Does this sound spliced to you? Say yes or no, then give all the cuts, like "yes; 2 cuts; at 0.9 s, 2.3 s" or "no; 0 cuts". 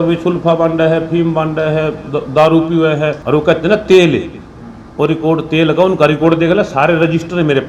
yes; 1 cut; at 3.2 s